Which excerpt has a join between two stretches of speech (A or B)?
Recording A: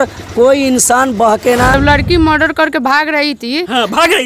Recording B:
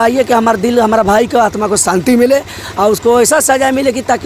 A